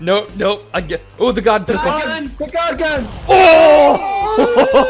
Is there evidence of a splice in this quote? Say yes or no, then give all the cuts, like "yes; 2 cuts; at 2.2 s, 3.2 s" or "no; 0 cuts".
yes; 1 cut; at 2.3 s